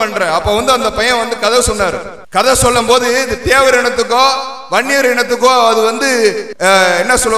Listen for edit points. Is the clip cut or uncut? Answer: cut